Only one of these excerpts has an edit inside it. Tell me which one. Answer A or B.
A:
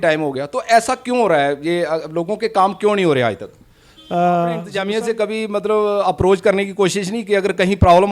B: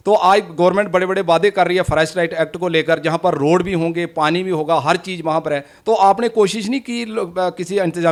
A